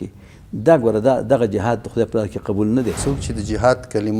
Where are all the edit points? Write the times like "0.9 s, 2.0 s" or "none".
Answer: 3.0 s